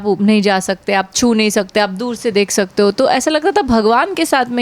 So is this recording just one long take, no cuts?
yes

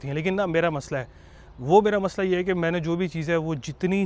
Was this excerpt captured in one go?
yes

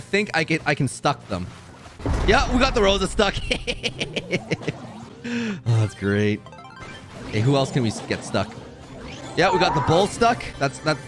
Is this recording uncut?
yes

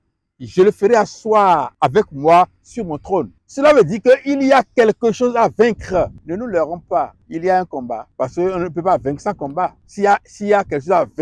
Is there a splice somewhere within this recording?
yes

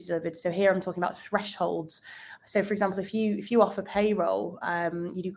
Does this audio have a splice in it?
no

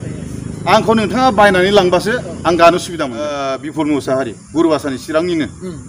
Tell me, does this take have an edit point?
yes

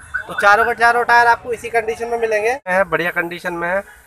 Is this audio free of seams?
no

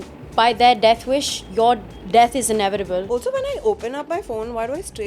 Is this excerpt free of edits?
no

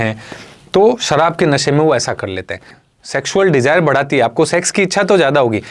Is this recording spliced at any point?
yes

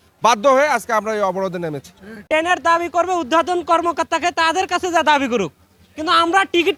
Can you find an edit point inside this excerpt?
no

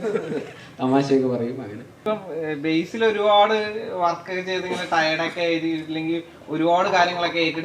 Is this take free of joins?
no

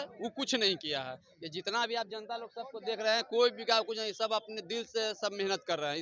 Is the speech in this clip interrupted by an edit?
no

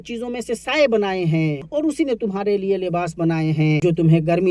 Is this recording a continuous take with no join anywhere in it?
no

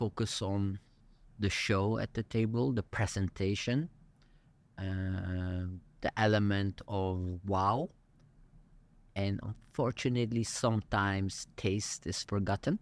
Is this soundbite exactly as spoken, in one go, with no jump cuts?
yes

